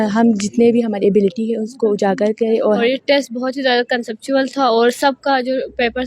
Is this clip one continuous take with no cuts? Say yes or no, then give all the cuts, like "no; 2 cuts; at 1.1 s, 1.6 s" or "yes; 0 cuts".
no; 1 cut; at 2.7 s